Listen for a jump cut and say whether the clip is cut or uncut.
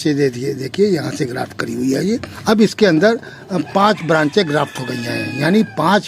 cut